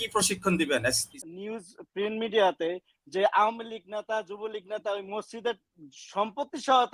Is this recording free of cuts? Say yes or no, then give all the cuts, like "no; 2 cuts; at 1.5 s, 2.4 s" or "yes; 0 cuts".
no; 1 cut; at 1.1 s